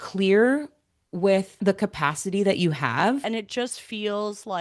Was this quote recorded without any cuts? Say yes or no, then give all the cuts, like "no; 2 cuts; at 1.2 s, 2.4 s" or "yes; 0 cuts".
no; 2 cuts; at 1.6 s, 3.2 s